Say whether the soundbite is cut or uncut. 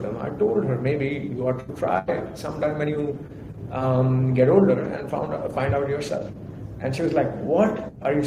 uncut